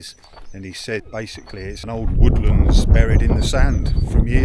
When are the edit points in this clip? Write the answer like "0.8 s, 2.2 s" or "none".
1.8 s